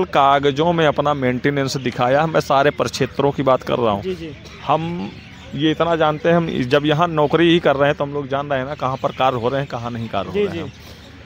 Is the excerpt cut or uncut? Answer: uncut